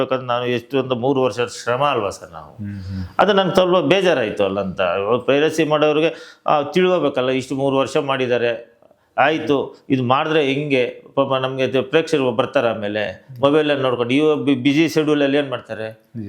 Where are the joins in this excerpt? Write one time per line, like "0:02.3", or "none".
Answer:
none